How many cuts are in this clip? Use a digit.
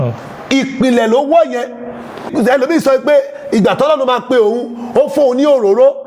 1